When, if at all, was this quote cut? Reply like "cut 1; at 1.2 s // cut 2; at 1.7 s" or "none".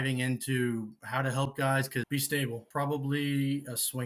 cut 1; at 2.4 s